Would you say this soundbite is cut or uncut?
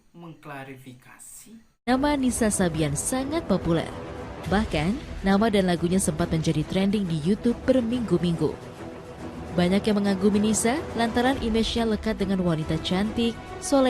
cut